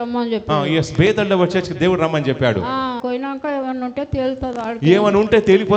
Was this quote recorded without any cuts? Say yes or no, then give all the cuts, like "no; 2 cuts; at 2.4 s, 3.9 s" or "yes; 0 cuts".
no; 1 cut; at 3.0 s